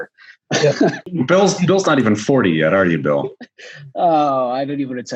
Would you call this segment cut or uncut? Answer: cut